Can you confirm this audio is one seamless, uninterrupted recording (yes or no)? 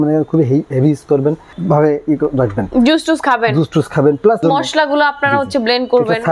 yes